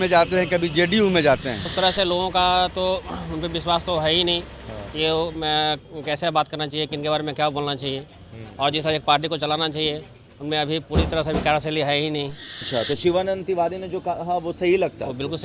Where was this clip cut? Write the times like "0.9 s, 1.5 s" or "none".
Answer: 1.7 s, 12.5 s